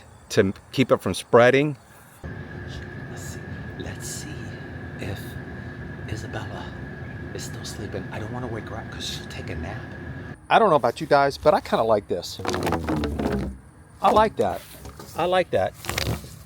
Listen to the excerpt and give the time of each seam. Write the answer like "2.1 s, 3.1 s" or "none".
2.2 s, 10.3 s